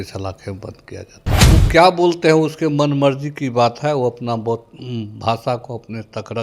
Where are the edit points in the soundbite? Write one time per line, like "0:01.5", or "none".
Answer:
0:01.5